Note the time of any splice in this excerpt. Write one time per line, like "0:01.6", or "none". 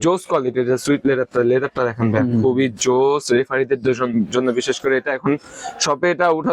none